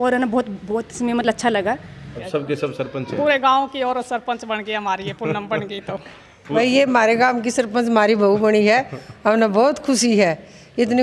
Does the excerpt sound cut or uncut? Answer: cut